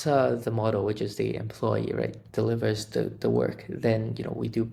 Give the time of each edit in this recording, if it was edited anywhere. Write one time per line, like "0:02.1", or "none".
none